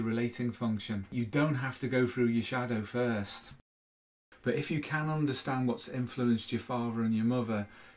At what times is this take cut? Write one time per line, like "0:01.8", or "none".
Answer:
0:01.0
0:03.7